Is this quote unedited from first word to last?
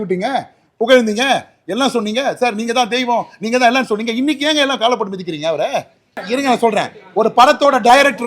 no; 1 cut; at 6.2 s

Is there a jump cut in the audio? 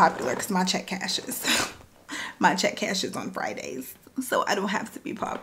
no; 0 cuts

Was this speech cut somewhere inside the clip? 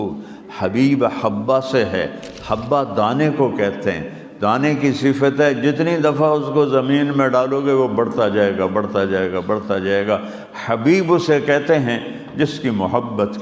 no; 0 cuts

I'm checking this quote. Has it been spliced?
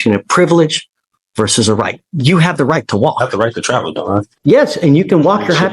yes; 1 cut; at 4.3 s

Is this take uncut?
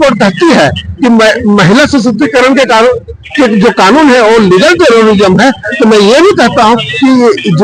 yes; 0 cuts

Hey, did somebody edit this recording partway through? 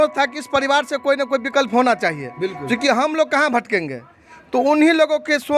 no; 0 cuts

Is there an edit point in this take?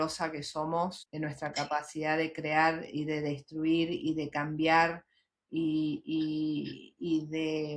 yes; 1 cut; at 1.0 s

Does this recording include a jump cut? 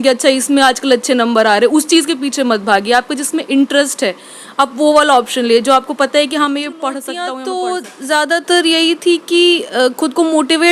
yes; 1 cut; at 7.3 s

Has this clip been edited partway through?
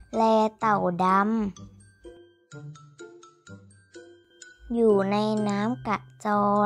yes; 2 cuts; at 1.6 s, 3.9 s

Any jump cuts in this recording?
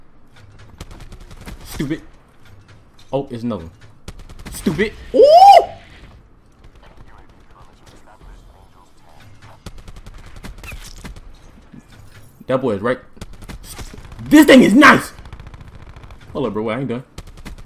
no; 0 cuts

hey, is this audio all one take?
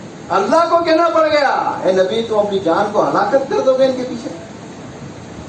yes; 0 cuts

